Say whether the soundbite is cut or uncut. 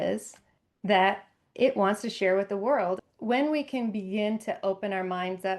cut